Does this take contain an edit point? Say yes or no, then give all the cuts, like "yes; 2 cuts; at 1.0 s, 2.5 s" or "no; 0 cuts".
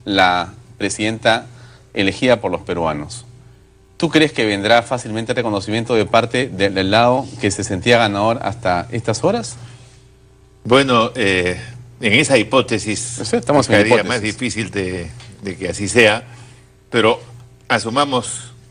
yes; 1 cut; at 12.6 s